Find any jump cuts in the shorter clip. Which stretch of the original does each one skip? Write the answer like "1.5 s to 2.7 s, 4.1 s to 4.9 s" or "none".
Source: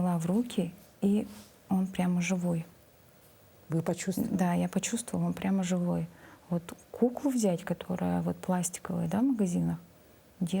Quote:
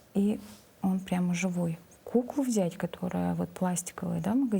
2.8 s to 6.8 s